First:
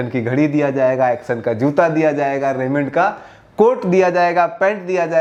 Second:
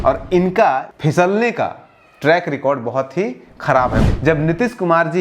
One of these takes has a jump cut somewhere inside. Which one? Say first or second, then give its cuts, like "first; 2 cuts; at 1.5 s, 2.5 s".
second; 2 cuts; at 0.9 s, 4.0 s